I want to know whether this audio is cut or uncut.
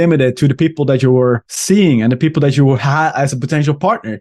cut